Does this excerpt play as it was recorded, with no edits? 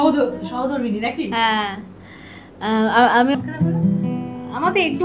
no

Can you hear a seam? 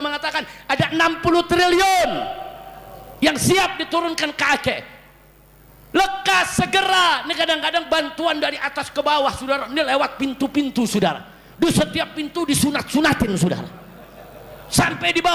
no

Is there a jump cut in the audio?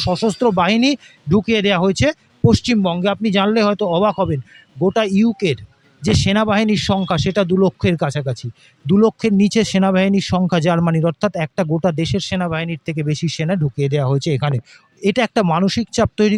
no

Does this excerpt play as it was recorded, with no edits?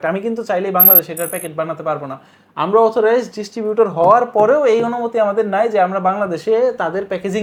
yes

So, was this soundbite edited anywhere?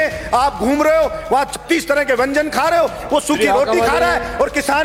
no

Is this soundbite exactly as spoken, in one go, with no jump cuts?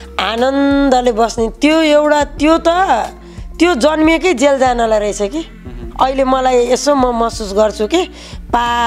yes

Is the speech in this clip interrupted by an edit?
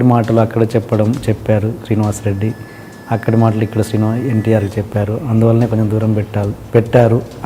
no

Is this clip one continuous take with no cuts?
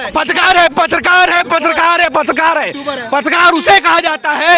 yes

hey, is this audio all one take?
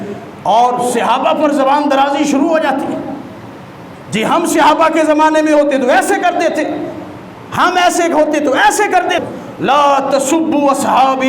no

